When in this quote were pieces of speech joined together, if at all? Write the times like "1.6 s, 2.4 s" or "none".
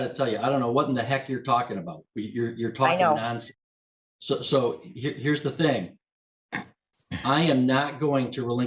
none